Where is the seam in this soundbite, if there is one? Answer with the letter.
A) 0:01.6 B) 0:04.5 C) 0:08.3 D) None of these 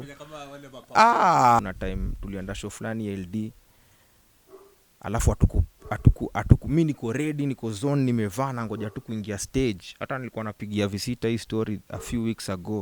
A